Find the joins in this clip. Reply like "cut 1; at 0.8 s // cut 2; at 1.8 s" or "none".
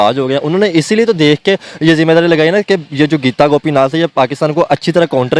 none

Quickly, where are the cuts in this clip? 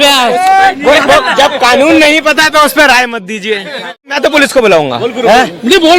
cut 1; at 4.1 s

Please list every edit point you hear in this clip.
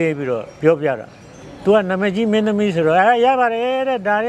none

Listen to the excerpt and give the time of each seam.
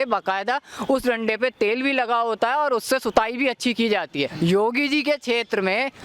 cut 1; at 4.3 s

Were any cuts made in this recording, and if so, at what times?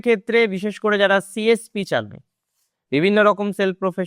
none

